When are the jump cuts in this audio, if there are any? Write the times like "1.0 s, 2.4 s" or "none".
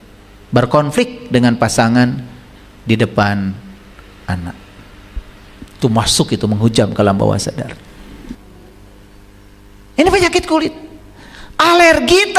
8.5 s